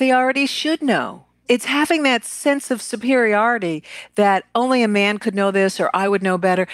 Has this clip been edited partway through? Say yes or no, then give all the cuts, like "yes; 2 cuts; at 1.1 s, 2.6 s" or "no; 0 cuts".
yes; 1 cut; at 1.3 s